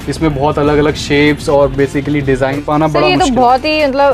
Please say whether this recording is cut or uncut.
cut